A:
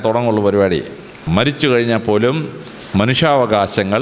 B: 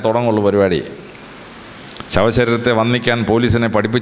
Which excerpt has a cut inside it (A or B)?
A